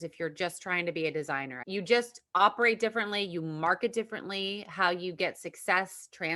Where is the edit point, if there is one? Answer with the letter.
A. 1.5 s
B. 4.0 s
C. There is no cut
A